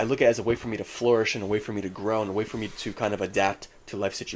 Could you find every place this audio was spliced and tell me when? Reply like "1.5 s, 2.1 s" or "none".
none